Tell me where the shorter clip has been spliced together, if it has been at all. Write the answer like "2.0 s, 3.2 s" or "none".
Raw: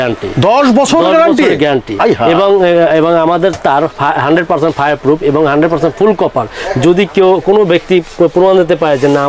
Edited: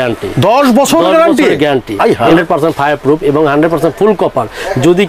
2.3 s